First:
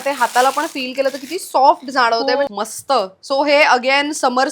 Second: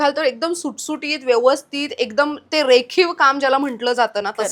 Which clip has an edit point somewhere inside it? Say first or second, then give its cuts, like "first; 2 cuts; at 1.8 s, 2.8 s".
first; 1 cut; at 2.5 s